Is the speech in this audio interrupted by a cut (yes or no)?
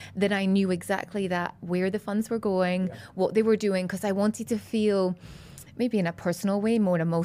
no